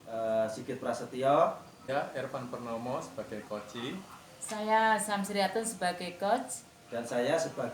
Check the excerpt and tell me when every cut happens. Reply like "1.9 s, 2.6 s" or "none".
1.9 s